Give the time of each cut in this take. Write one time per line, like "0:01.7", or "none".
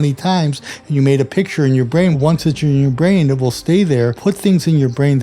0:02.1
0:04.2